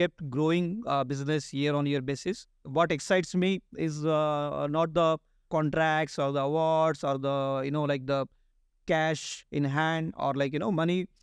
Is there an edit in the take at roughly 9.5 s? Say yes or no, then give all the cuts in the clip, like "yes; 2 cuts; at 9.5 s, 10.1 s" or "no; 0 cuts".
no; 2 cuts; at 2.7 s, 5.4 s